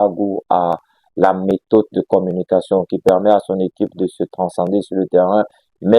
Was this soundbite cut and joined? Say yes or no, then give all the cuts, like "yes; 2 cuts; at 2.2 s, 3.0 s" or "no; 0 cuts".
no; 0 cuts